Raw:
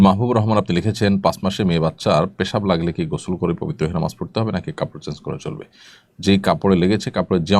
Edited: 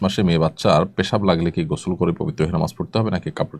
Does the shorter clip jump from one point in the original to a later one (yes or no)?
no